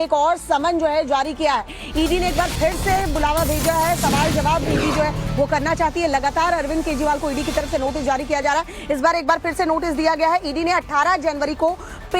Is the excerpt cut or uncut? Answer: uncut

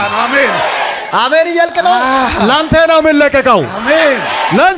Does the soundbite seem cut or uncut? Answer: uncut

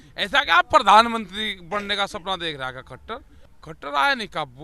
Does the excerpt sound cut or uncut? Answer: cut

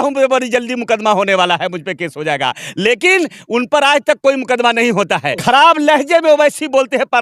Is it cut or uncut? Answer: cut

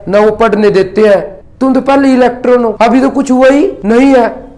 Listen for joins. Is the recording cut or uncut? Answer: cut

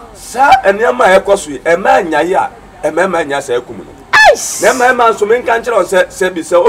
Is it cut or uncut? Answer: uncut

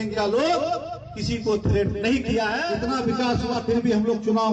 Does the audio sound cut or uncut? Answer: cut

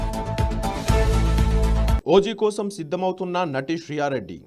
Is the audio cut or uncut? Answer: cut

